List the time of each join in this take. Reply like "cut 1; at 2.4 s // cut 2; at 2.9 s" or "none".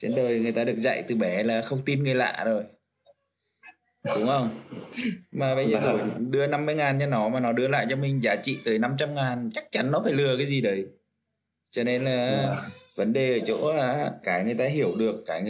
cut 1; at 14.2 s